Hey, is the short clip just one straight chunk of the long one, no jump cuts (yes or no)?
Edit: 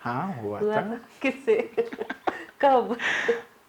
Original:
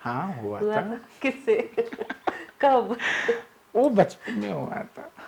yes